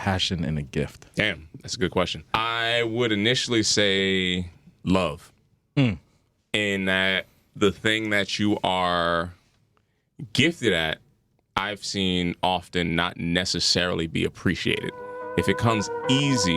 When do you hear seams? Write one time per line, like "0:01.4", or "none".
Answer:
0:02.2
0:04.6